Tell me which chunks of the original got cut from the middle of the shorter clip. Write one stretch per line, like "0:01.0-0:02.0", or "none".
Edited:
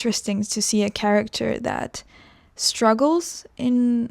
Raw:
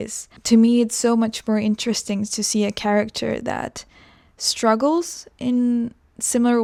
none

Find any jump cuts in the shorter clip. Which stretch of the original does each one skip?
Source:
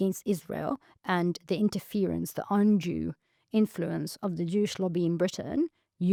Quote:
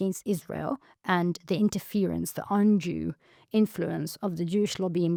none

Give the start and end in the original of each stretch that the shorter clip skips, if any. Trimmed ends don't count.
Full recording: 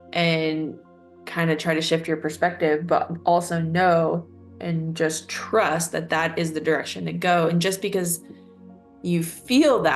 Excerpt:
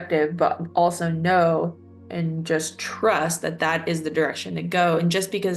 none

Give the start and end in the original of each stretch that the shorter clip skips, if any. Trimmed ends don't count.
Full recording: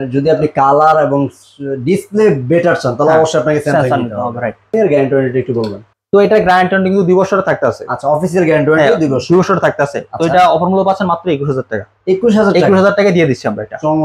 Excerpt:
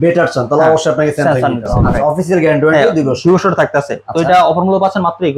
0:04.3-0:07.9

